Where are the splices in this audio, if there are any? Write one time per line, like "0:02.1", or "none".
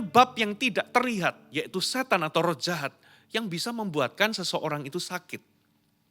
none